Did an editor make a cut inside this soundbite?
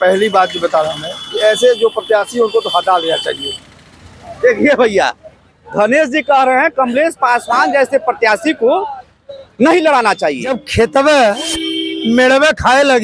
yes; 1 cut; at 10.6 s

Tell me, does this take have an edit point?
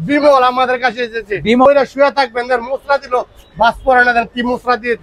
yes; 1 cut; at 1.6 s

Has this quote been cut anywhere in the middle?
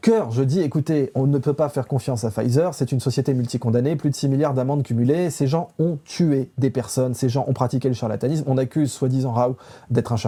no; 0 cuts

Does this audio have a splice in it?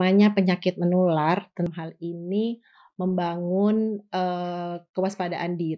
yes; 1 cut; at 1.7 s

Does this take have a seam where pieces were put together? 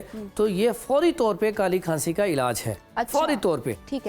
no; 0 cuts

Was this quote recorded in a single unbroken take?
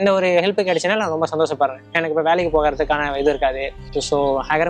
no; 1 cut; at 3.8 s

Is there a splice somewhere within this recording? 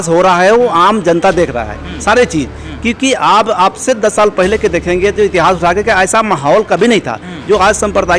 no; 0 cuts

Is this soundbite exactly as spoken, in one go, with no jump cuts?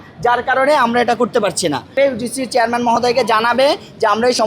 no; 1 cut; at 1.9 s

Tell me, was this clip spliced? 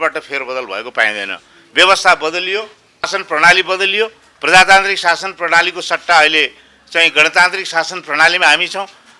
yes; 1 cut; at 3.2 s

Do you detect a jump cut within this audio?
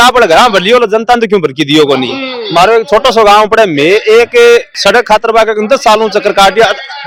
no; 0 cuts

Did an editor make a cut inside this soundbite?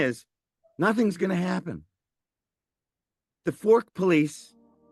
no; 0 cuts

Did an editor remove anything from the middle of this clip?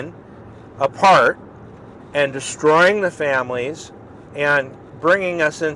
yes; 1 cut; at 4.8 s

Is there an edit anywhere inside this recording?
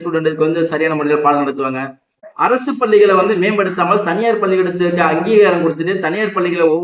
yes; 1 cut; at 2.2 s

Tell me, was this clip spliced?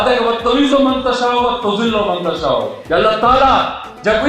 yes; 1 cut; at 2.8 s

